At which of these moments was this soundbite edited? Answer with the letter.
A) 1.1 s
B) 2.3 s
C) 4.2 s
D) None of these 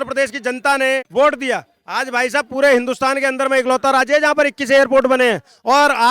A